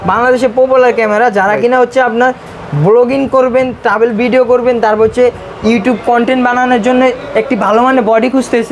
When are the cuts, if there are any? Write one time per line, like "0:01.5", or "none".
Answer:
none